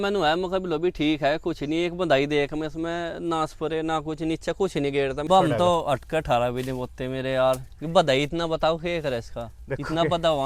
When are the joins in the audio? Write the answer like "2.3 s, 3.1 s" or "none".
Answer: 5.3 s